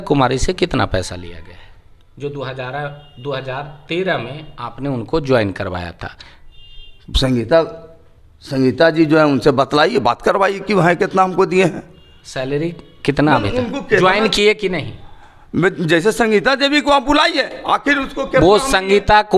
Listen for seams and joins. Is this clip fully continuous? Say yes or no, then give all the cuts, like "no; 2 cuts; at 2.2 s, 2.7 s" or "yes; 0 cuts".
yes; 0 cuts